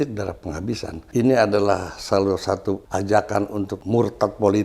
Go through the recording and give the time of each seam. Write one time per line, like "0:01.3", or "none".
0:01.0
0:02.8
0:03.8